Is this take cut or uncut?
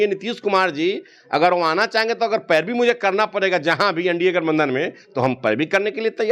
uncut